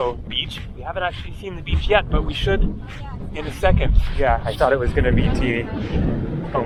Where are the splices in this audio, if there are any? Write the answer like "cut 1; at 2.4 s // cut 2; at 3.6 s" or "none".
none